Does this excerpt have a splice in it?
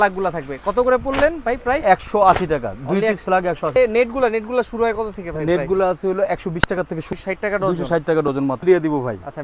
yes; 3 cuts; at 3.8 s, 7.1 s, 8.6 s

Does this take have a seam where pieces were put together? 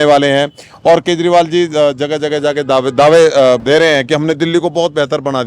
yes; 1 cut; at 3.6 s

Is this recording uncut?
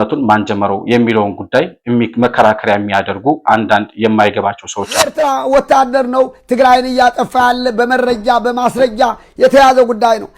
no; 1 cut; at 5.1 s

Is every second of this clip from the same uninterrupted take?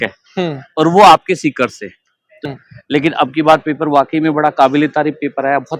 no; 1 cut; at 2.5 s

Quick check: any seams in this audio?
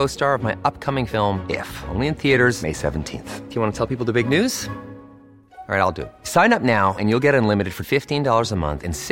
no; 0 cuts

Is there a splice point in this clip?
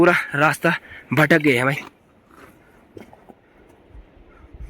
yes; 1 cut; at 1.8 s

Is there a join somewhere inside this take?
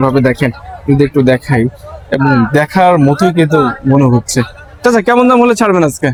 no; 0 cuts

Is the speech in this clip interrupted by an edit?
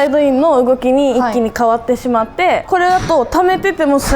yes; 1 cut; at 2.6 s

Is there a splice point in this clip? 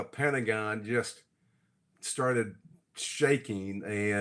no; 0 cuts

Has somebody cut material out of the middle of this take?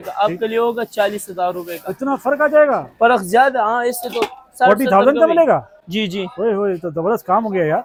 no; 0 cuts

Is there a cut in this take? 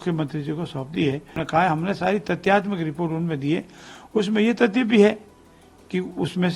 yes; 1 cut; at 1.4 s

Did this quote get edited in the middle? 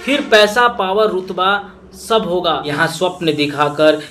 yes; 1 cut; at 2.7 s

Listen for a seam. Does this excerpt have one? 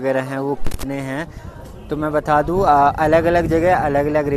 no; 0 cuts

